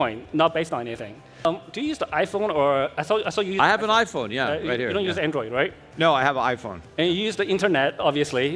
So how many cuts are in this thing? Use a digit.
1